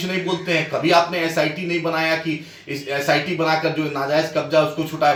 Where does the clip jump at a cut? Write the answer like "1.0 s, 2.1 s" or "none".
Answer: none